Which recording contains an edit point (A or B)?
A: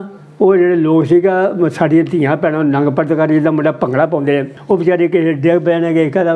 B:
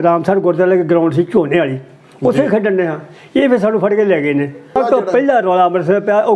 B